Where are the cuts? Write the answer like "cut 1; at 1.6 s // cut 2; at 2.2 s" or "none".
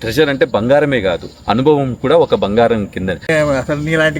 cut 1; at 3.3 s